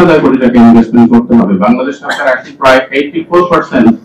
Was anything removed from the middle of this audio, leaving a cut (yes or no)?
no